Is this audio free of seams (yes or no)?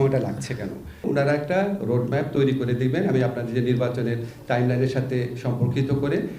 no